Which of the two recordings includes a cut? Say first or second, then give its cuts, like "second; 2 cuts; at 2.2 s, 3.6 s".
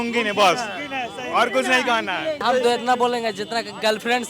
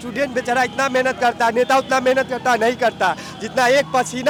first; 1 cut; at 2.4 s